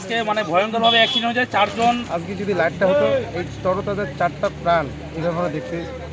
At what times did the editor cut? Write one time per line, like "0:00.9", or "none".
0:02.1